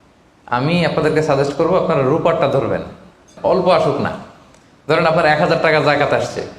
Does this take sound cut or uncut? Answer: cut